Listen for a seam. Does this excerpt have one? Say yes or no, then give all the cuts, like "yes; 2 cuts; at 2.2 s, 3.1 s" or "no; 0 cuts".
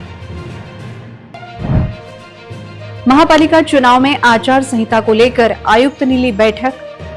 yes; 1 cut; at 1.2 s